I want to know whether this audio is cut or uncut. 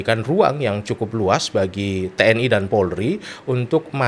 uncut